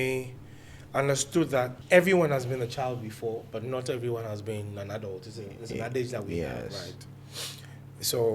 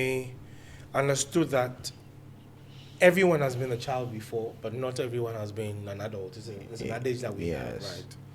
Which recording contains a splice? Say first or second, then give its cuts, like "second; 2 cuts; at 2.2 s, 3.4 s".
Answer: first; 1 cut; at 1.8 s